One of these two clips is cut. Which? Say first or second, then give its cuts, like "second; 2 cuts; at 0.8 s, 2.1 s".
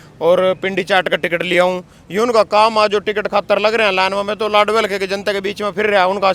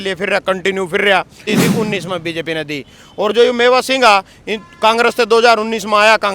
second; 1 cut; at 1.5 s